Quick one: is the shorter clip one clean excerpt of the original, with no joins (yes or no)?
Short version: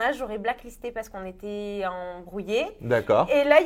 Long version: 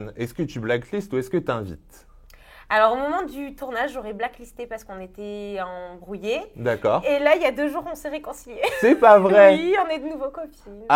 yes